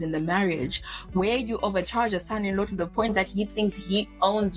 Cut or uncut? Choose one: uncut